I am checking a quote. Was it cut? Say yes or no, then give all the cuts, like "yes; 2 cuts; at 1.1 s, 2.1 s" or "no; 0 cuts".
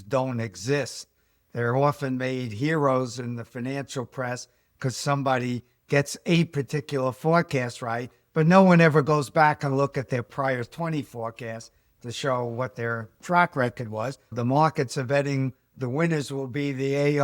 yes; 2 cuts; at 14.3 s, 15.7 s